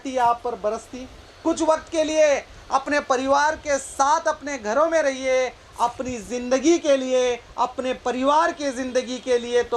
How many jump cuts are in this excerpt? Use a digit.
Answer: 1